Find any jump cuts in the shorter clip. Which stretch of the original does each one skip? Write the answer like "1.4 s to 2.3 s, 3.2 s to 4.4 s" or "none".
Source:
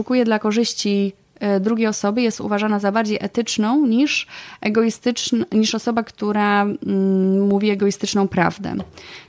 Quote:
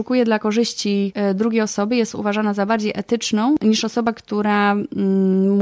1.1 s to 1.4 s, 3.8 s to 5.5 s